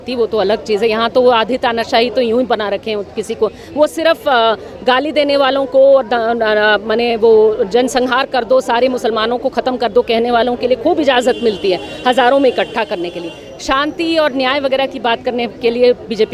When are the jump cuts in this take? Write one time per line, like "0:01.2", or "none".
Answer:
none